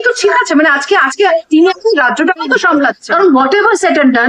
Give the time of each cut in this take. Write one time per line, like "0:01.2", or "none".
0:03.0